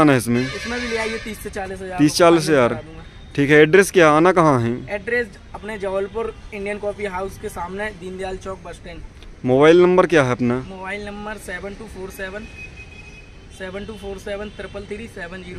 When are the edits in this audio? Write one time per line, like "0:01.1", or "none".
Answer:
none